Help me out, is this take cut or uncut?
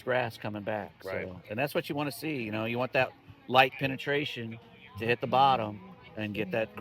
uncut